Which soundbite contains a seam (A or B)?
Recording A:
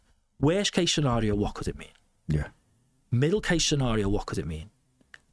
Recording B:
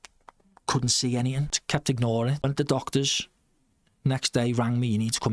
B